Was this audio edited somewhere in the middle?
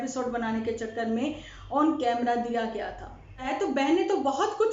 yes; 1 cut; at 3.5 s

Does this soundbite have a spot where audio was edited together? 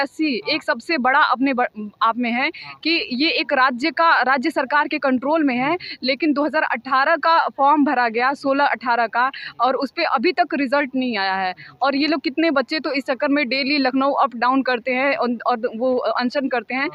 no; 0 cuts

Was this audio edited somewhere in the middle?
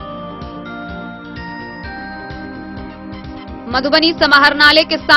no; 0 cuts

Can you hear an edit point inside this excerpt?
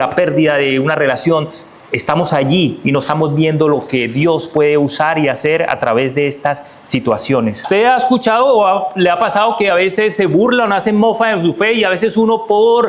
yes; 1 cut; at 7.6 s

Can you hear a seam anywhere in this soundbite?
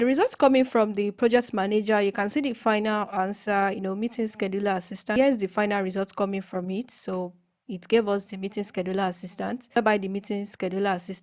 yes; 2 cuts; at 5.2 s, 9.8 s

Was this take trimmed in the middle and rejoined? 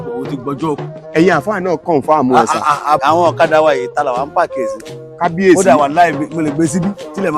yes; 2 cuts; at 0.9 s, 3.0 s

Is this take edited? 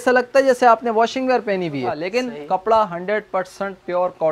yes; 1 cut; at 2.0 s

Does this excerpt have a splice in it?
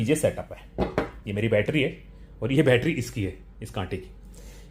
no; 0 cuts

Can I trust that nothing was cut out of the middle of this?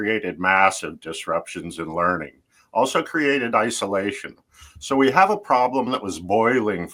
yes; 0 cuts

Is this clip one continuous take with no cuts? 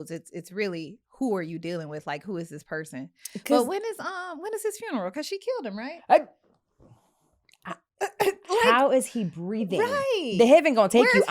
yes; 0 cuts

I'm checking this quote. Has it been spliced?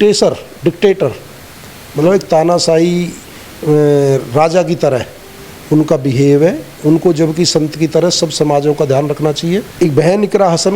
yes; 1 cut; at 9.7 s

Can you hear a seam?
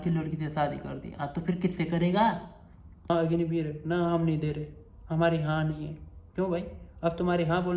yes; 1 cut; at 3.1 s

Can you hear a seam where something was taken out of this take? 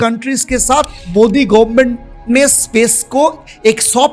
yes; 1 cut; at 1.0 s

